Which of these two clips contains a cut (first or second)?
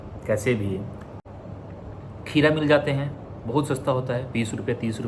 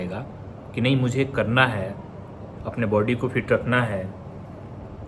first